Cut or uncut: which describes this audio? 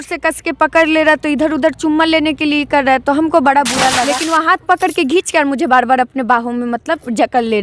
cut